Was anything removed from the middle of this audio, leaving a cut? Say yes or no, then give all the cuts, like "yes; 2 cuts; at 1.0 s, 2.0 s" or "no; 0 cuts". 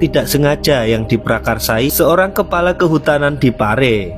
yes; 1 cut; at 1.9 s